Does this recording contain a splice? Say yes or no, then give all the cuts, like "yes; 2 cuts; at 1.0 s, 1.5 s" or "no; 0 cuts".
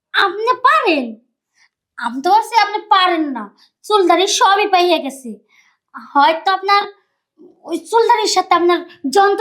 no; 0 cuts